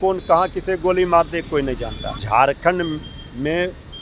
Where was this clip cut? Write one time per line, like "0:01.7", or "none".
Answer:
0:02.2